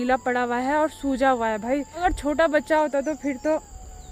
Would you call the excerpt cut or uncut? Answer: uncut